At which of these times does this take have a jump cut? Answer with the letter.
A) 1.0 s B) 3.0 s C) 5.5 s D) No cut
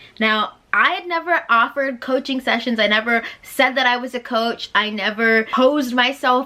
C